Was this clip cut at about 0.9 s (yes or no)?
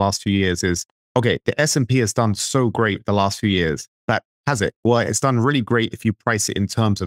yes